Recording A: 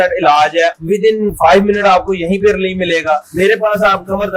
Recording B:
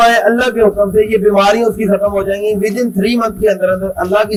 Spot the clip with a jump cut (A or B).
A